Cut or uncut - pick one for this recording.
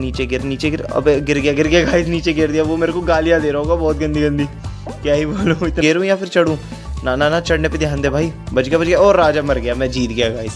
cut